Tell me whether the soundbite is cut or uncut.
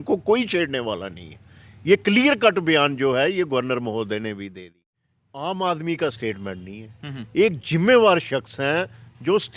cut